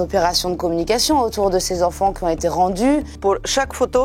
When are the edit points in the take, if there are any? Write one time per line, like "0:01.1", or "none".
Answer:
0:03.1

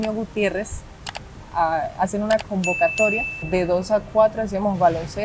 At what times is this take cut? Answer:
0:03.4

